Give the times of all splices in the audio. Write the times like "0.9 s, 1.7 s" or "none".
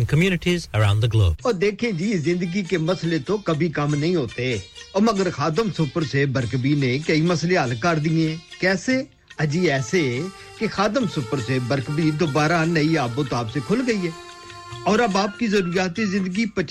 1.3 s